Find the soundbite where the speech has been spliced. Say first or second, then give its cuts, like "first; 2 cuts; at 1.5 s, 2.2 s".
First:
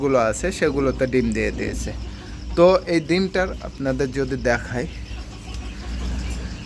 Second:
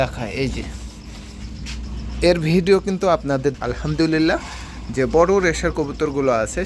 second; 1 cut; at 3.6 s